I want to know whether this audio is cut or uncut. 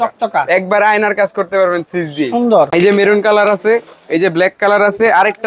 cut